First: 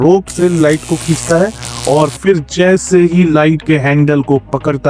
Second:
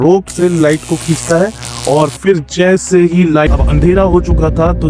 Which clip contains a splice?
second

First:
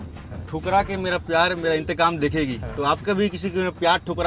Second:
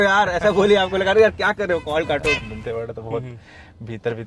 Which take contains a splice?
second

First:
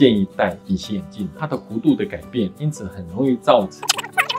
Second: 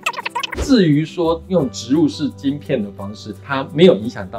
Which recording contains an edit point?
first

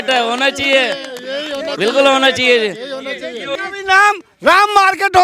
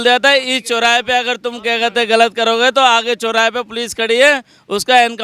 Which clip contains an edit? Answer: first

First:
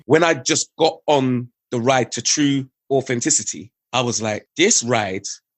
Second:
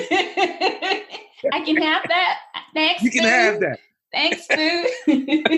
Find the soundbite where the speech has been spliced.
first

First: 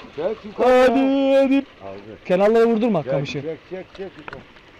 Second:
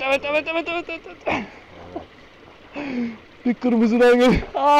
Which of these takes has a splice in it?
first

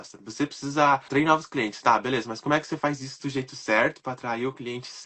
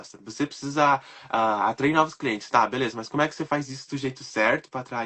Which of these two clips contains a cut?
first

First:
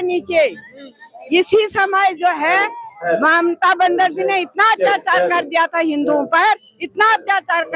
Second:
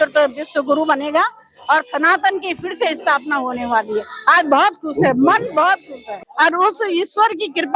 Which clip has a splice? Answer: second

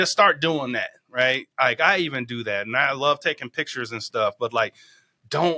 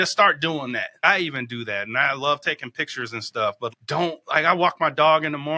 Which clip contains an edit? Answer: second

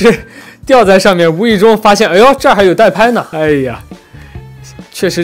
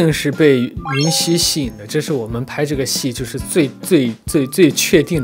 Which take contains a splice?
first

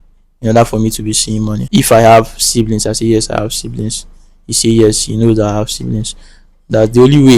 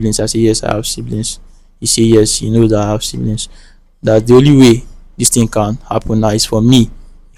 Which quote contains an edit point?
first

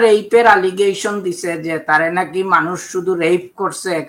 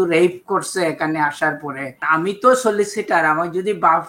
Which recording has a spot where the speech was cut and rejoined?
second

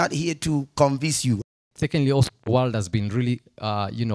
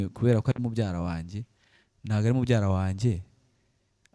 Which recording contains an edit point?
first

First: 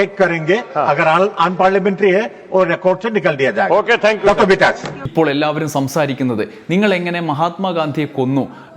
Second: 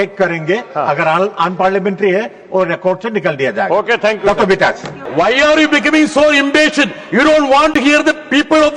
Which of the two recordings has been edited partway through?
first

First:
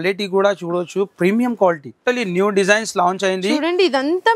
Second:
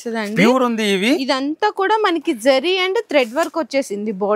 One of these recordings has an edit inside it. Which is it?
first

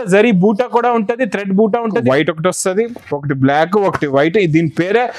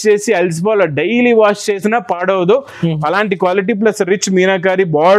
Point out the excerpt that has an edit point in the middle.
first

